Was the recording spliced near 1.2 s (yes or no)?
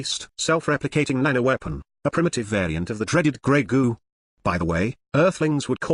no